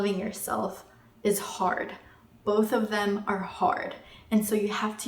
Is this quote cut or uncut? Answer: uncut